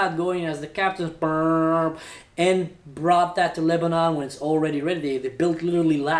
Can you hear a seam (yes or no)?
no